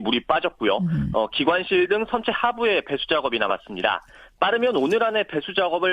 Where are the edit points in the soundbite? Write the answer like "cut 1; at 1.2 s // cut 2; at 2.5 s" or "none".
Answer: cut 1; at 4.4 s